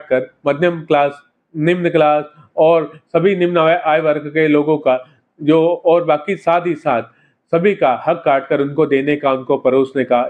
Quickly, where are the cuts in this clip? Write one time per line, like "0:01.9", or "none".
none